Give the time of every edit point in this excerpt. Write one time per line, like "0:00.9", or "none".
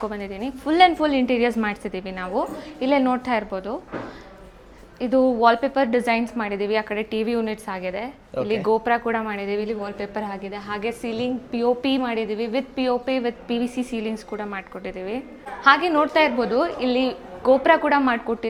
none